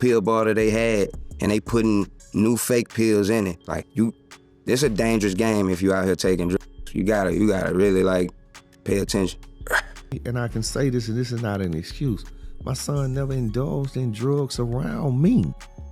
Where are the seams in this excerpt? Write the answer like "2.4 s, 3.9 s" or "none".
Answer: 10.2 s